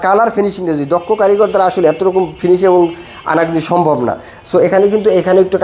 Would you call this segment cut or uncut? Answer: uncut